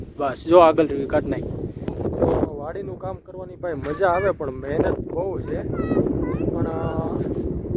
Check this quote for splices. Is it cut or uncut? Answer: cut